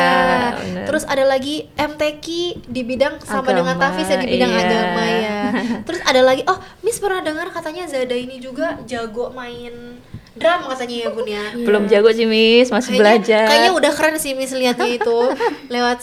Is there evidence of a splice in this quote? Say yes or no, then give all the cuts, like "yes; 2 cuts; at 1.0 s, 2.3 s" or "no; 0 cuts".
no; 0 cuts